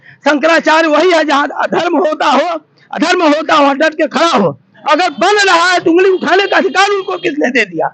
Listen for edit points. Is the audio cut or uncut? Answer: cut